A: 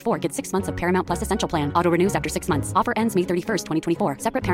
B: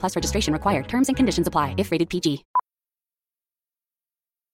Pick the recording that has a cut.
B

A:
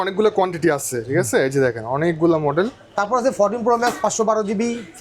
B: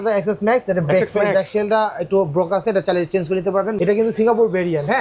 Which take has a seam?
B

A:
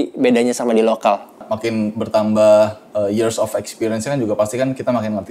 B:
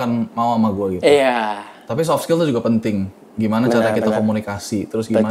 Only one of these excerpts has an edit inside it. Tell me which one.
A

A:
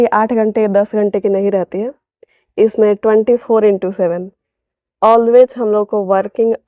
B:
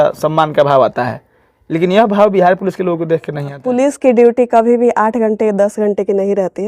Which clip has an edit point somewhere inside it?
B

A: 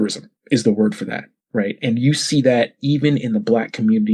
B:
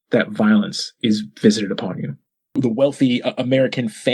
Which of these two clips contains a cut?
B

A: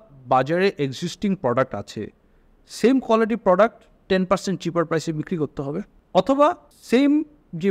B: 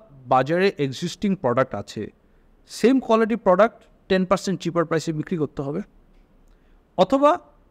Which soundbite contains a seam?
A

